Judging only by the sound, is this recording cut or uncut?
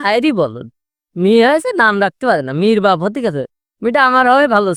uncut